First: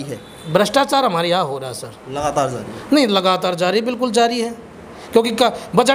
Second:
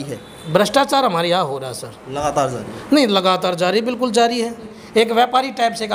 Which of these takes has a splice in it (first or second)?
second